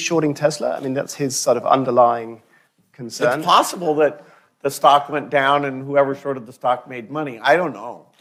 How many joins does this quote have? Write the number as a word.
zero